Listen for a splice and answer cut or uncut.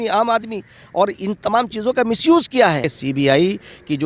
cut